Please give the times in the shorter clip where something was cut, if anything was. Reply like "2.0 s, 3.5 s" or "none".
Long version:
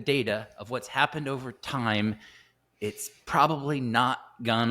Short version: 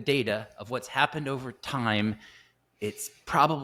none